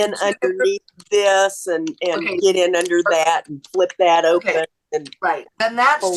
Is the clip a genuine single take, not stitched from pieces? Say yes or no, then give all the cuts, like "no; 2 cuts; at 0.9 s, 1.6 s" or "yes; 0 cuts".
yes; 0 cuts